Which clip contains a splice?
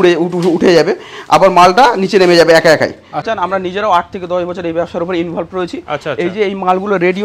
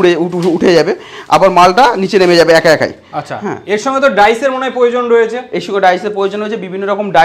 first; 1 cut; at 3.2 s

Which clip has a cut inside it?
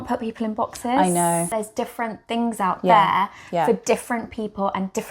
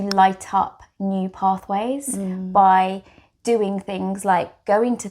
first; 1 cut; at 1.5 s

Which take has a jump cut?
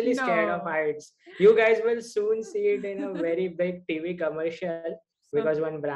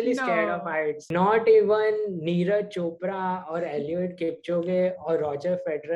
second; 1 cut; at 1.0 s

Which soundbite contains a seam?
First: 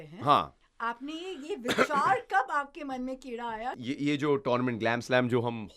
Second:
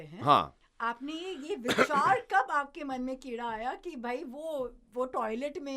first; 1 cut; at 3.8 s

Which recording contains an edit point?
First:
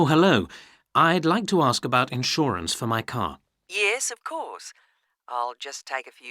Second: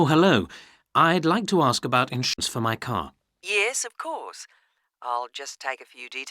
second; 1 cut; at 2.3 s

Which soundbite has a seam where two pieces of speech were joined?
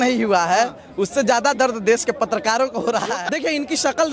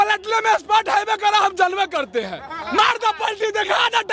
first; 1 cut; at 3.2 s

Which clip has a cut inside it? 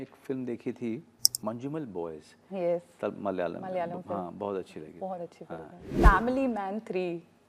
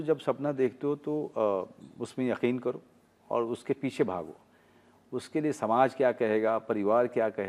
first; 2 cuts; at 1.3 s, 5.9 s

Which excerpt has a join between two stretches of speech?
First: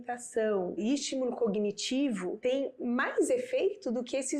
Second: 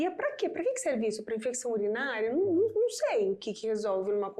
first; 2 cuts; at 0.8 s, 2.4 s

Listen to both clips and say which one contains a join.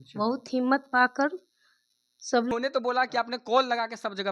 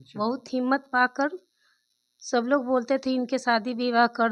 first; 1 cut; at 2.5 s

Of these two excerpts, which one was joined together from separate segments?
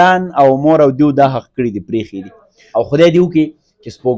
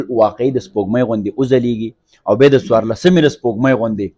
first; 1 cut; at 2.6 s

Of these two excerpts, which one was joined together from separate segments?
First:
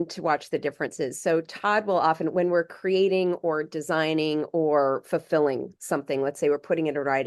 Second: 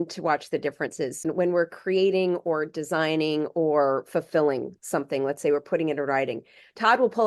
second; 1 cut; at 1.2 s

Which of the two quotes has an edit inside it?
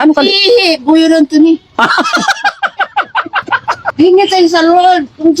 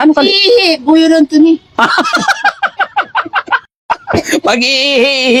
first; 1 cut; at 3.7 s

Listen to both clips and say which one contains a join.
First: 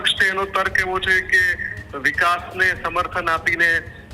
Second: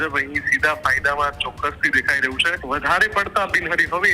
second; 1 cut; at 2.5 s

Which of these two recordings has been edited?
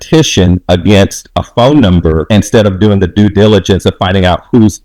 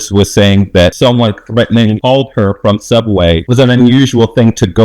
second; 2 cuts; at 0.9 s, 3.4 s

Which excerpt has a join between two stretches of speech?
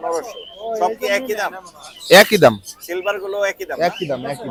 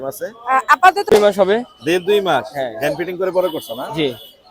second; 1 cut; at 1.1 s

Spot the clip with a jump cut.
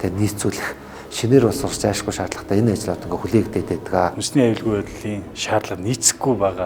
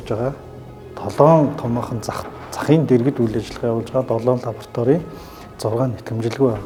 first; 1 cut; at 4.2 s

